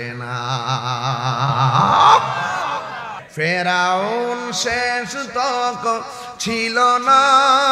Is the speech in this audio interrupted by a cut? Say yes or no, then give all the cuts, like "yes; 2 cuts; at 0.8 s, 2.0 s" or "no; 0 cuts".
yes; 1 cut; at 3.2 s